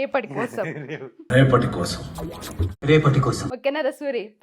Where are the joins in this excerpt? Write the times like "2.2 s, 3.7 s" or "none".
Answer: none